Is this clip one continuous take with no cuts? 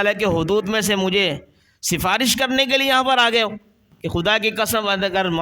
no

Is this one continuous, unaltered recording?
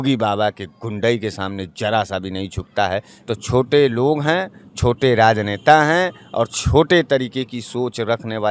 no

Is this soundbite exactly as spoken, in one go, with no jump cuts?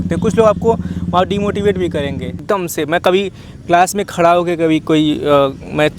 no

